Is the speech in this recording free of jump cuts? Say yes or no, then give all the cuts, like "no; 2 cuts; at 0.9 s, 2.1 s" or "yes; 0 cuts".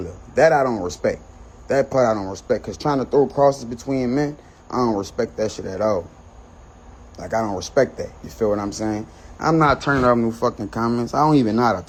yes; 0 cuts